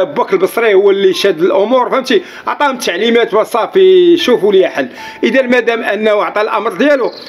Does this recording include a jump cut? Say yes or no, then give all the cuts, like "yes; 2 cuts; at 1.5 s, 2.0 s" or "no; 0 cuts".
no; 0 cuts